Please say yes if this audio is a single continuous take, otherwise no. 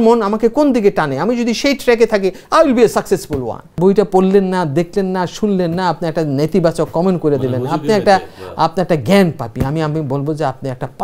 no